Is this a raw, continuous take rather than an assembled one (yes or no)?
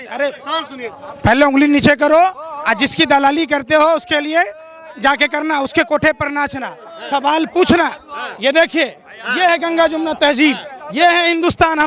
yes